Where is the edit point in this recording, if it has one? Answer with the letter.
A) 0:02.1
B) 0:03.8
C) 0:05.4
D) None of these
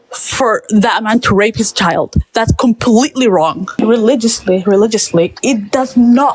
B